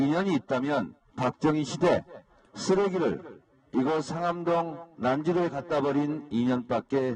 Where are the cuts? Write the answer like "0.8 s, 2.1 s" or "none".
5.9 s